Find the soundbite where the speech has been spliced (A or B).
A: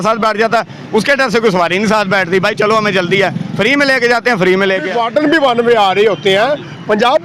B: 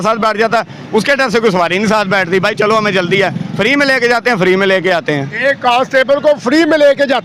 A